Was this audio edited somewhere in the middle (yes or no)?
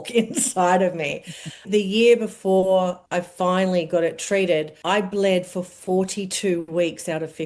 yes